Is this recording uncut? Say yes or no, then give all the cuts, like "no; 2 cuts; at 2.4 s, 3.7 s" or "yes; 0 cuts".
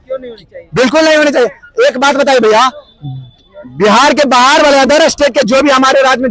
yes; 0 cuts